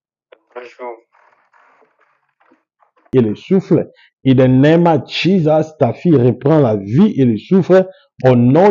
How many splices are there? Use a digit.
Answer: 1